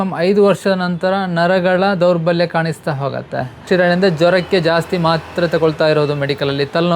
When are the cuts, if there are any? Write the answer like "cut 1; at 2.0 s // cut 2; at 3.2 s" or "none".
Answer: cut 1; at 3.6 s